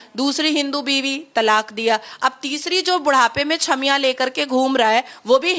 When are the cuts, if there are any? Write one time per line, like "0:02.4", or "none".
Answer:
none